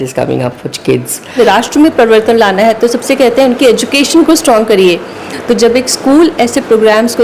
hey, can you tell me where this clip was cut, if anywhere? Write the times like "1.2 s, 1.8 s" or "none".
1.4 s